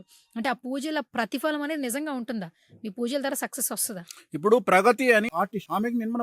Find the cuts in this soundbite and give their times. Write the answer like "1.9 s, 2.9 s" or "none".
5.3 s